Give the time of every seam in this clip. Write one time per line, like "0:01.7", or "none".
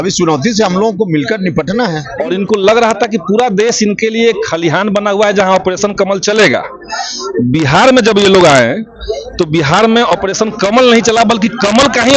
0:02.1